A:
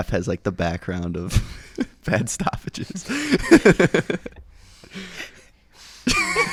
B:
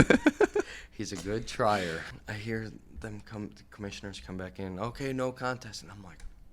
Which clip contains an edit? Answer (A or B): B